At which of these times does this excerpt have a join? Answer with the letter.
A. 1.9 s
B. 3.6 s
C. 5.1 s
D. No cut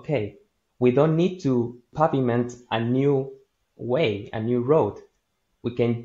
A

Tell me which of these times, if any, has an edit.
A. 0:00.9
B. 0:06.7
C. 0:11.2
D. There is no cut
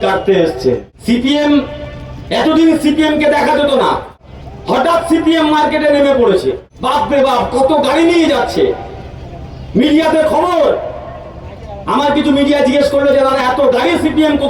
A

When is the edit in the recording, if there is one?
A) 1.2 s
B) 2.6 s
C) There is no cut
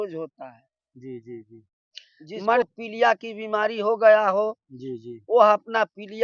B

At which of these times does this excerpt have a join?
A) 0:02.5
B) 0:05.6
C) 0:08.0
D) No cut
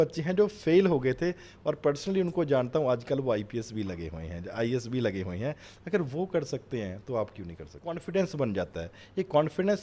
C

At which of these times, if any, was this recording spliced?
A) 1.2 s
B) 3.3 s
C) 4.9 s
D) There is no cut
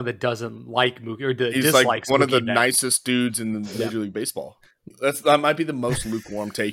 C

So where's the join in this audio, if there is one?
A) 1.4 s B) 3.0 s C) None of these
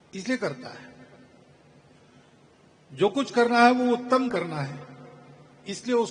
C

